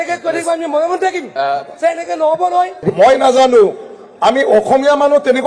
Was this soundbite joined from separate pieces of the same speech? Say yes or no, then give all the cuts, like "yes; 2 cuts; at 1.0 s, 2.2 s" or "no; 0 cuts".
yes; 1 cut; at 2.8 s